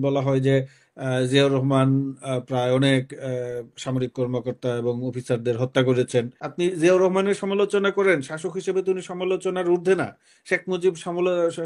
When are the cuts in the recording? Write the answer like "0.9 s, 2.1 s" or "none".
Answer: 6.4 s